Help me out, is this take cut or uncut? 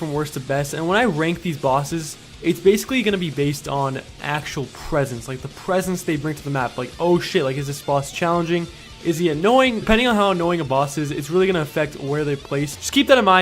cut